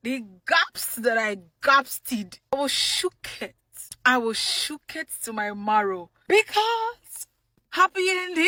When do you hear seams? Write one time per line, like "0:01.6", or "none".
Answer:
none